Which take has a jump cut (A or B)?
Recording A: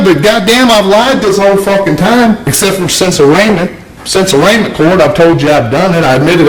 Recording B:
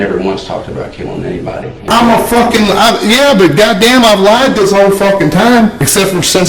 B